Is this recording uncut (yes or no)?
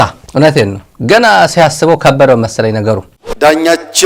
no